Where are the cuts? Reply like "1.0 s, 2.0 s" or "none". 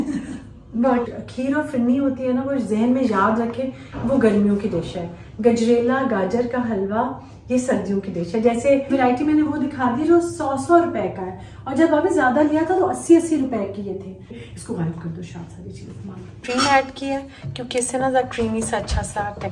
1.1 s, 8.9 s, 14.4 s, 16.4 s